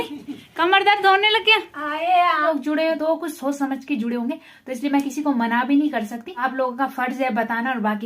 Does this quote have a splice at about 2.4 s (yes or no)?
yes